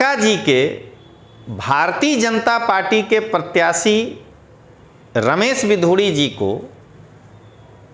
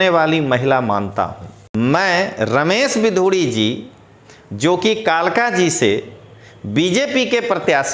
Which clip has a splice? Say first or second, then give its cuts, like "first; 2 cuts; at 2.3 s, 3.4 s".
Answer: second; 1 cut; at 1.6 s